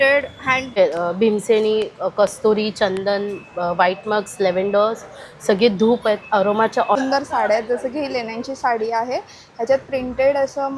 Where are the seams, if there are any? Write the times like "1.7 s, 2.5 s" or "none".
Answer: 0.7 s, 7.0 s